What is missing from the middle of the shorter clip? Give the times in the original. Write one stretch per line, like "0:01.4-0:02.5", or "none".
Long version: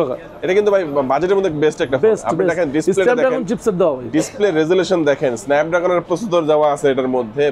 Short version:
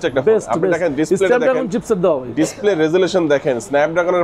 none